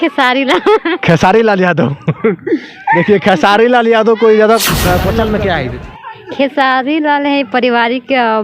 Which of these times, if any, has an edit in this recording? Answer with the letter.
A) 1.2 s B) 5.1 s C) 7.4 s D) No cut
B